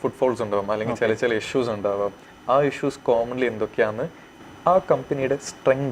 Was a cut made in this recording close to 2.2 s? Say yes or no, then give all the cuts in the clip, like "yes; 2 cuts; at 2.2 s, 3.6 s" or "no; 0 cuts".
no; 1 cut; at 4.3 s